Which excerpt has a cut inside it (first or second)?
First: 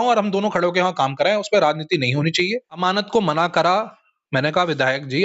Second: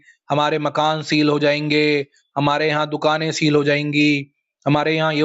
first